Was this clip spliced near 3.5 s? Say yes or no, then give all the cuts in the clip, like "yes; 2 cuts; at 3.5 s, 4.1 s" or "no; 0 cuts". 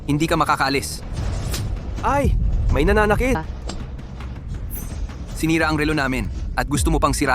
yes; 1 cut; at 3.5 s